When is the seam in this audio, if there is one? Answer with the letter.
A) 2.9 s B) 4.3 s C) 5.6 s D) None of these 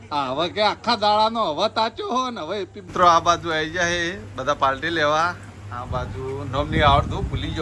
A